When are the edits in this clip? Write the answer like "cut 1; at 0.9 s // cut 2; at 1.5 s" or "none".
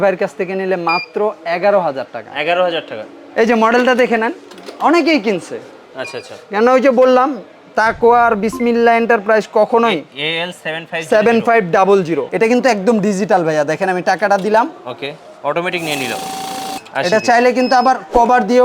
cut 1; at 12.3 s // cut 2; at 16.8 s